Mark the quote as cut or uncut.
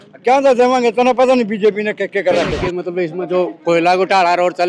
cut